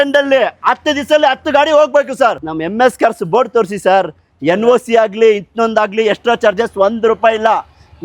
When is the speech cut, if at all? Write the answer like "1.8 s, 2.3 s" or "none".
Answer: 2.4 s